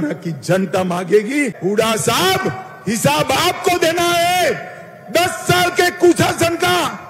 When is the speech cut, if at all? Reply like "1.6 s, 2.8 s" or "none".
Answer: 1.5 s